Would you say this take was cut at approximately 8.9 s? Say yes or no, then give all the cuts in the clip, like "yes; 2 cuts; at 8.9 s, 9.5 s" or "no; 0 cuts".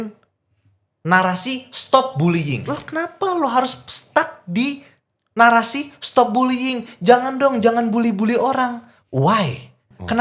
no; 1 cut; at 2.7 s